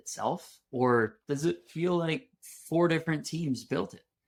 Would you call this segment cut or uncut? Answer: uncut